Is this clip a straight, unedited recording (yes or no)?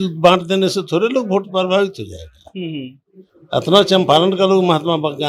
yes